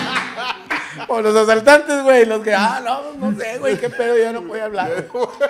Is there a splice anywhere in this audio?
no; 0 cuts

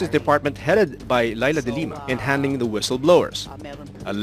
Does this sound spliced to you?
yes; 1 cut; at 1.0 s

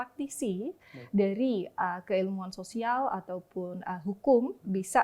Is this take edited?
no; 0 cuts

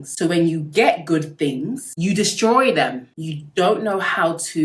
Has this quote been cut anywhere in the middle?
no; 0 cuts

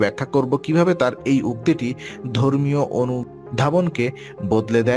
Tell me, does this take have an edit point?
yes; 1 cut; at 3.4 s

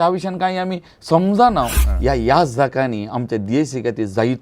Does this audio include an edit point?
yes; 1 cut; at 1.8 s

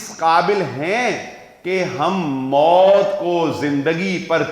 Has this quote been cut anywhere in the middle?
no; 0 cuts

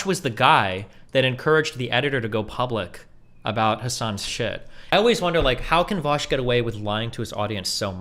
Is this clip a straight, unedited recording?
no; 1 cut; at 4.9 s

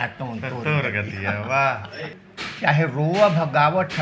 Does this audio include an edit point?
yes; 1 cut; at 2.2 s

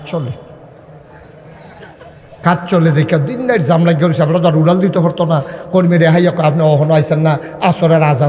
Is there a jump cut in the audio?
yes; 1 cut; at 1.4 s

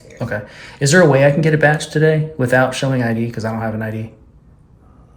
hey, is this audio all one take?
yes; 0 cuts

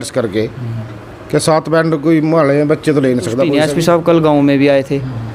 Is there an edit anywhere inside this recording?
yes; 1 cut; at 3.5 s

